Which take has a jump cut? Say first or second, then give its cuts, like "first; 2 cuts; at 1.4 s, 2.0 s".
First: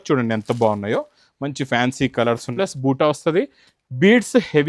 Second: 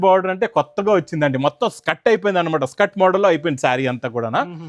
first; 1 cut; at 2.5 s